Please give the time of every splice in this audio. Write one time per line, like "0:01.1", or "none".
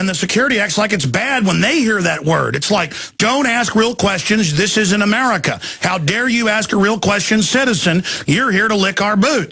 none